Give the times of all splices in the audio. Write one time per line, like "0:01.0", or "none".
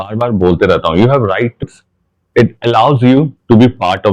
0:01.6